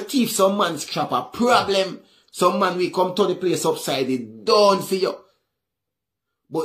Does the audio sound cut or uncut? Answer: uncut